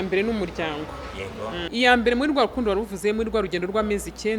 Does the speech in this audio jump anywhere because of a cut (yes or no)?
yes